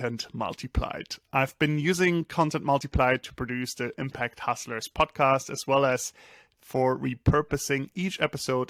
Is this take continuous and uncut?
yes; 0 cuts

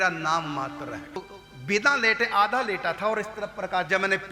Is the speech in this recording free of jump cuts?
no; 1 cut; at 1.2 s

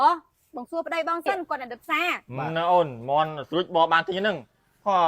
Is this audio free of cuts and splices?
no; 1 cut; at 2.3 s

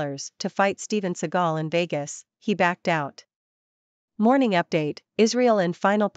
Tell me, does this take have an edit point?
yes; 1 cut; at 4.1 s

